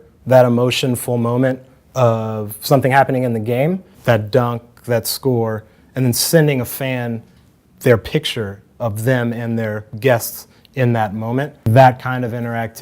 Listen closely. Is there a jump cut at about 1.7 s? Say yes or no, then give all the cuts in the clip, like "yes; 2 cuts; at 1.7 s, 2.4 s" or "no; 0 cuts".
no; 2 cuts; at 3.9 s, 11.7 s